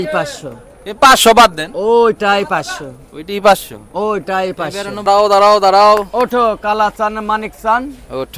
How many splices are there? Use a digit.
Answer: 1